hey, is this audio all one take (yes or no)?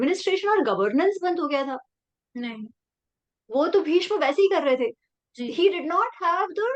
yes